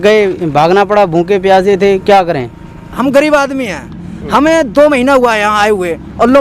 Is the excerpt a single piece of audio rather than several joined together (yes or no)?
no